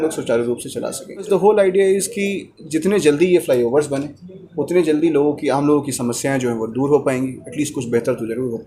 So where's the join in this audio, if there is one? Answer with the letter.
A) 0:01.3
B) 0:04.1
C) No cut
A